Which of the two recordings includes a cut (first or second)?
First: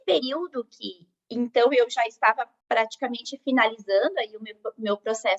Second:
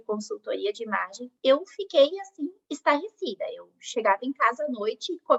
first